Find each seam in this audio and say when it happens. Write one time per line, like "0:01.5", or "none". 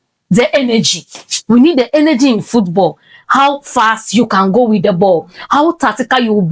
none